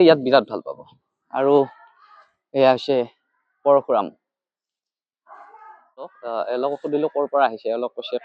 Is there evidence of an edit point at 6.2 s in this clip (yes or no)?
yes